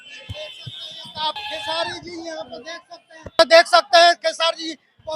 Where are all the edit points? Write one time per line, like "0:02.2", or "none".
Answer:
0:01.4
0:03.3